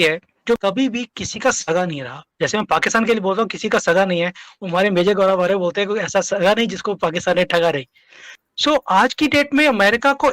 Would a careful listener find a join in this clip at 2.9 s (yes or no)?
no